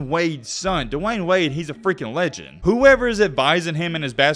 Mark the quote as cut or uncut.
cut